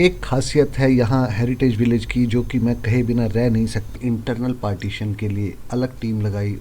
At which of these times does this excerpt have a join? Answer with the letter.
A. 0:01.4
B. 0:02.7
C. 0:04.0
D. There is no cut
C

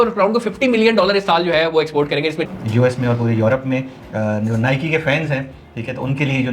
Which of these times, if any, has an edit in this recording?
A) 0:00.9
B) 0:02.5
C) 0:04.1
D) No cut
B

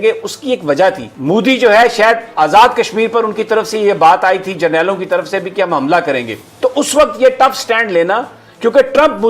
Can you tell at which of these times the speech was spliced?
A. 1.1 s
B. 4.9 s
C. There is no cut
A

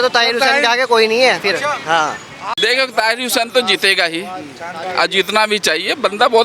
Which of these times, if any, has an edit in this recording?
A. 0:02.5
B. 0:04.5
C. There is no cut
A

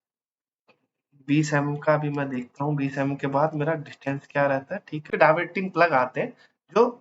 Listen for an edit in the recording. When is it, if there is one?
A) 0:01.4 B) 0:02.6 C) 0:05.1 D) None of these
C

